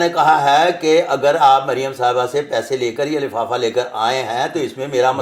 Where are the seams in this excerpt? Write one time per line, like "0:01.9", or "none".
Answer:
none